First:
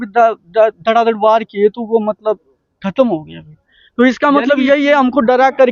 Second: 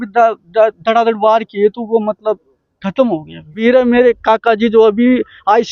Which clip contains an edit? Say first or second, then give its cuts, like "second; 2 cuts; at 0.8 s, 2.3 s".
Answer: second; 1 cut; at 3.6 s